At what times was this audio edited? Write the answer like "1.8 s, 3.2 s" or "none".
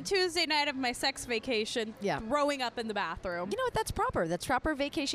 none

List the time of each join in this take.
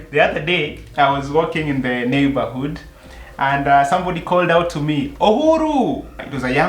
none

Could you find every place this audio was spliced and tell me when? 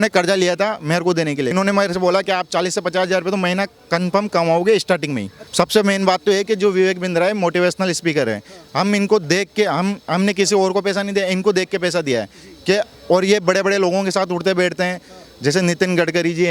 1.5 s, 5.4 s

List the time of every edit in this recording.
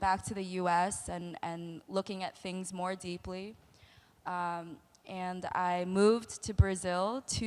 3.8 s

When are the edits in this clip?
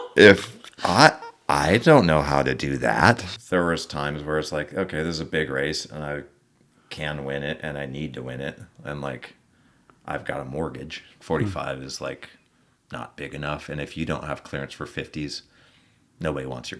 3.3 s, 11.1 s

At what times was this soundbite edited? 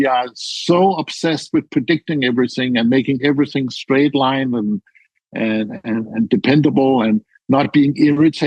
none

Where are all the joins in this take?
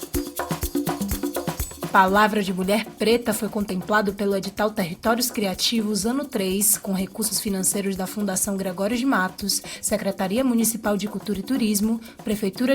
1.9 s

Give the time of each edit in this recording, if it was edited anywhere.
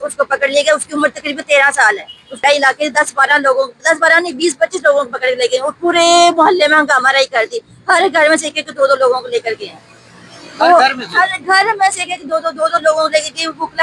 2.4 s

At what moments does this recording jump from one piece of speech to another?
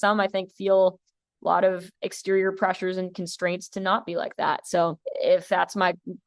5.0 s

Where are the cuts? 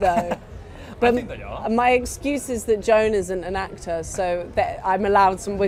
none

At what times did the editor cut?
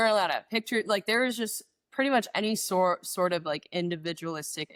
none

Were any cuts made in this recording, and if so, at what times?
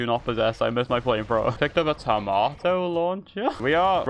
none

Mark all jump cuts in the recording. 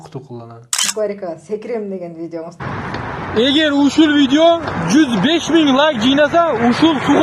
0.9 s, 2.6 s

